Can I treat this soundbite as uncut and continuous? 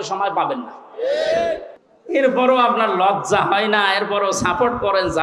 no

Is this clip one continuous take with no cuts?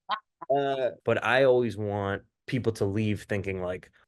no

